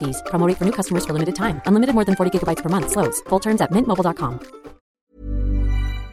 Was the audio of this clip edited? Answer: yes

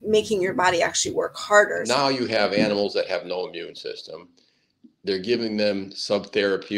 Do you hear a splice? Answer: yes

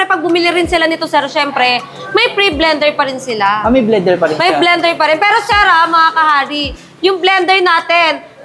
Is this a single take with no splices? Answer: yes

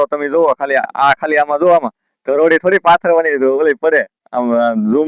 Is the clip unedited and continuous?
yes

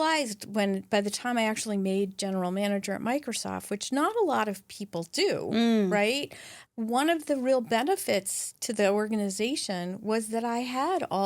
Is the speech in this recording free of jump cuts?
no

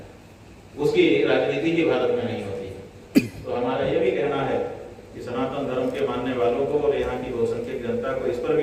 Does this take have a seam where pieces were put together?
no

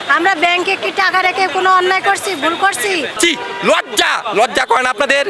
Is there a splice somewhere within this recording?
yes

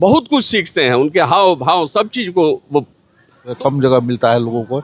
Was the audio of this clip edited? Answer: yes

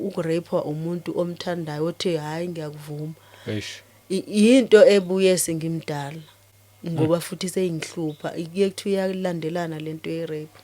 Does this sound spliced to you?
no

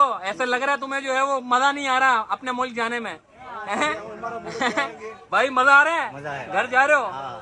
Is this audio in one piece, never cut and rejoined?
yes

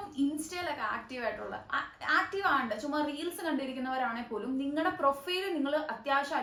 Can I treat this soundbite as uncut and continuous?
yes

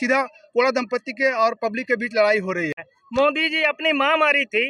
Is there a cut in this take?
yes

